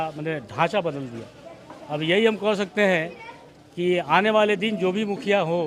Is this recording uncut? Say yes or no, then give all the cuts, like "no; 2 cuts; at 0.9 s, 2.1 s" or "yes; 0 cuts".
yes; 0 cuts